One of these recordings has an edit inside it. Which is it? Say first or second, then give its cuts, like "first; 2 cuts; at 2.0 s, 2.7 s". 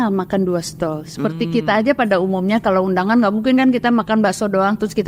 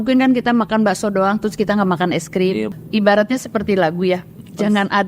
second; 1 cut; at 2.7 s